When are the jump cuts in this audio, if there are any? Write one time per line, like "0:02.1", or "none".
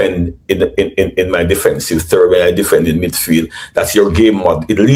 none